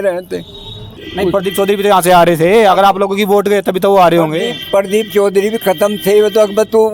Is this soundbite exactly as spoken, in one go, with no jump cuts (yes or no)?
no